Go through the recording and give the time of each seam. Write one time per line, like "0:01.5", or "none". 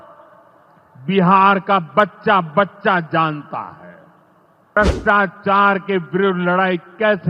0:04.8